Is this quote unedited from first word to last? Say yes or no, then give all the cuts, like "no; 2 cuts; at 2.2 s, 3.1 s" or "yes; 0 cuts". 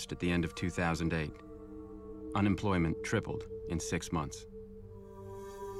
yes; 0 cuts